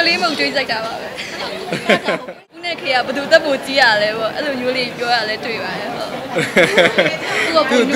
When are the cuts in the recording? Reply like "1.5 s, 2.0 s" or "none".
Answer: 2.7 s